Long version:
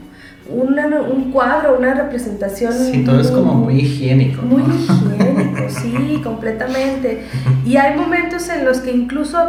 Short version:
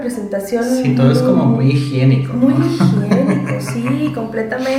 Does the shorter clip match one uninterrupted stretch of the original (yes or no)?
yes